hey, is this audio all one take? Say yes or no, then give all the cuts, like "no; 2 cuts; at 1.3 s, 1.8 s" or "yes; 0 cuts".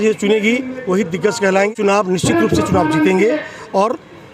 no; 1 cut; at 1.7 s